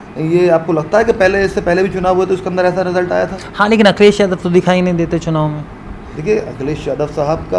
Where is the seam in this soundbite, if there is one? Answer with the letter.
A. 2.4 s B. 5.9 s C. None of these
C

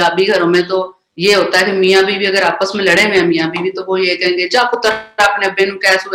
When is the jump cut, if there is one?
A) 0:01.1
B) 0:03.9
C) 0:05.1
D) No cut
D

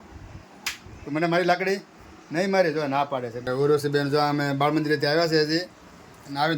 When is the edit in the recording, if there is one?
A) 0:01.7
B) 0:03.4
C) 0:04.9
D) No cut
B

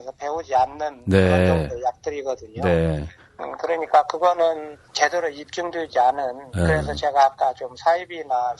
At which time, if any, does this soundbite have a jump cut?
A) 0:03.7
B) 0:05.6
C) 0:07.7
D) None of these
A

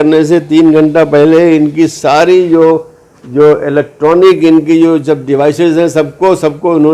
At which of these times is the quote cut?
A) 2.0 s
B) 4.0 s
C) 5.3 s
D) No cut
D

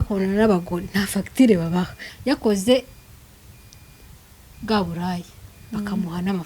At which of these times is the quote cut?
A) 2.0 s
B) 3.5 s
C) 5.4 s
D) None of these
A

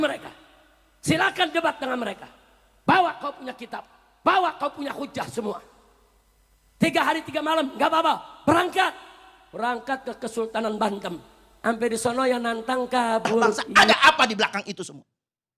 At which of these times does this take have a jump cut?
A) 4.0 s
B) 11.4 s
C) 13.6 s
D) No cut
C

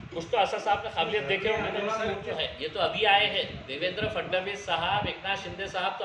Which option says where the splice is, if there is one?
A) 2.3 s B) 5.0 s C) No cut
A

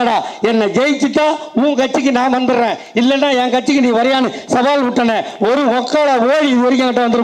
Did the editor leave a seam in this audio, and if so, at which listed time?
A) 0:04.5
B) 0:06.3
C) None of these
C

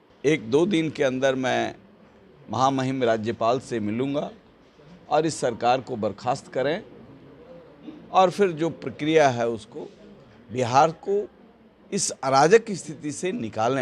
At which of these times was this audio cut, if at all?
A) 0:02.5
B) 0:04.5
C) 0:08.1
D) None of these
D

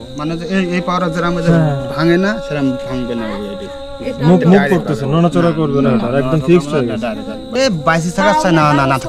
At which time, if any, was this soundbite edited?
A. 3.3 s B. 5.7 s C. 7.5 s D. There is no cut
C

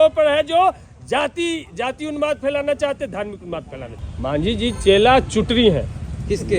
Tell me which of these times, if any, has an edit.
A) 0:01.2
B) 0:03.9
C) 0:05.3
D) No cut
B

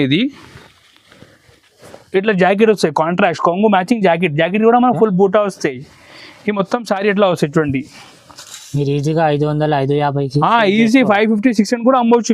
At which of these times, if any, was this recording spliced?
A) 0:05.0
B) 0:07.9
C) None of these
C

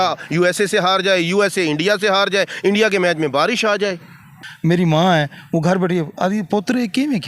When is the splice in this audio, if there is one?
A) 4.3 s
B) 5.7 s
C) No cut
A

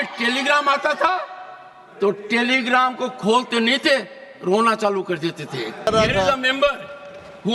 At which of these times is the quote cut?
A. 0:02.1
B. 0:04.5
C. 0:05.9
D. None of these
C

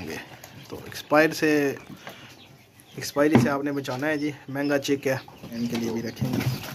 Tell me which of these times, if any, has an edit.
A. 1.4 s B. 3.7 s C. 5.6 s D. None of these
C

